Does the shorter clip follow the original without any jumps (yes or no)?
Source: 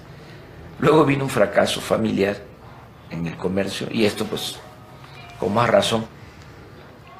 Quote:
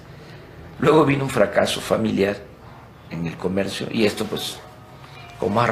yes